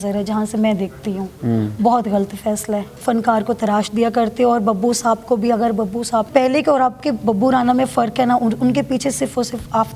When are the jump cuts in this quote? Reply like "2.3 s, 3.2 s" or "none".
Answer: 3.0 s, 6.3 s